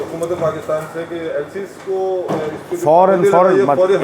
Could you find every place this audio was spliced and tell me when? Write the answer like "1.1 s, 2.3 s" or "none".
none